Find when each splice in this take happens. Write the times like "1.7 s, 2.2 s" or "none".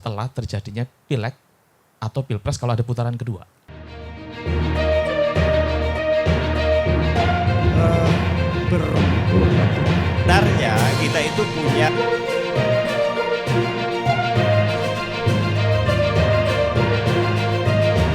3.8 s